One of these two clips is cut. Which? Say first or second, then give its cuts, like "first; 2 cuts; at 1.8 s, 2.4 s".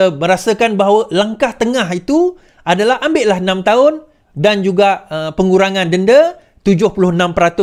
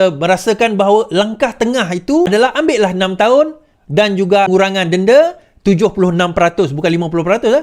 second; 2 cuts; at 2.3 s, 4.5 s